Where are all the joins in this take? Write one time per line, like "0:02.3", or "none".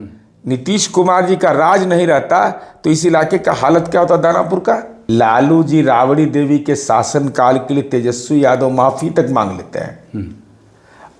0:04.9